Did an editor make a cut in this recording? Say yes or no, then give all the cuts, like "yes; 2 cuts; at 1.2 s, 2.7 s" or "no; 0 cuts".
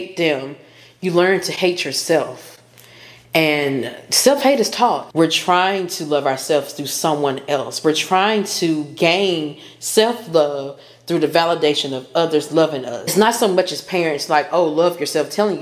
yes; 2 cuts; at 5.1 s, 13.1 s